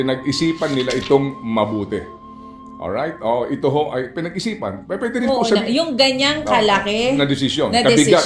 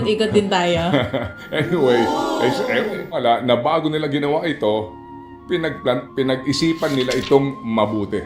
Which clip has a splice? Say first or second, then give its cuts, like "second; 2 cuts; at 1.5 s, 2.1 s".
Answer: second; 1 cut; at 3.2 s